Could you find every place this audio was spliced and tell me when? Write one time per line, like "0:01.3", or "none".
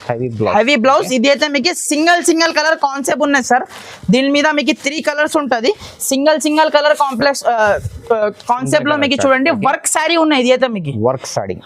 none